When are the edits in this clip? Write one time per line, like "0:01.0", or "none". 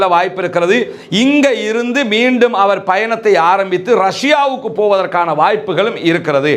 none